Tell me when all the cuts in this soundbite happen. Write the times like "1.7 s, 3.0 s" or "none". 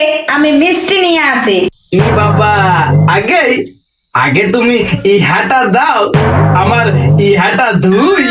none